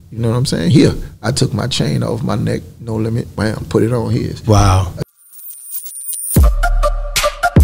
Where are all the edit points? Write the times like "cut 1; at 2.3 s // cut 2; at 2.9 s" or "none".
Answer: cut 1; at 5.0 s